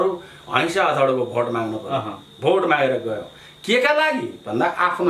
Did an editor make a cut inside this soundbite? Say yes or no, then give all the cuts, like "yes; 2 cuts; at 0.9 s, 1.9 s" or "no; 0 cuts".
no; 0 cuts